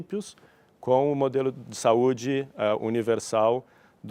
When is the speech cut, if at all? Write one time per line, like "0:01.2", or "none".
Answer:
none